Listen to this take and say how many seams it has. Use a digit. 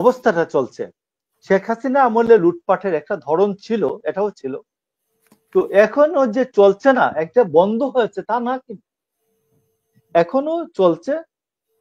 0